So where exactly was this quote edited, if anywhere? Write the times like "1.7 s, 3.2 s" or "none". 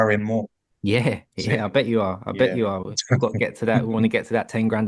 none